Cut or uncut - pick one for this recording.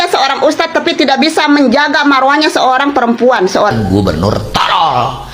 cut